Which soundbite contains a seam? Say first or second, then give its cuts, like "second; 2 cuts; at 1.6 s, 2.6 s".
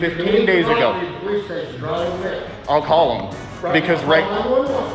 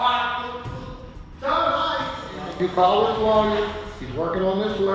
second; 1 cut; at 2.5 s